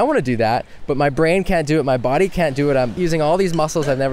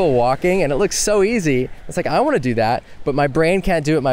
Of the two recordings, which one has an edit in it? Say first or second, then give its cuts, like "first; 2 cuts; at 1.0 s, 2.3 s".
first; 1 cut; at 3.0 s